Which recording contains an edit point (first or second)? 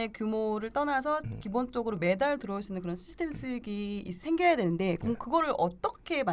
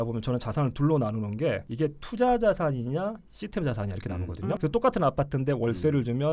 second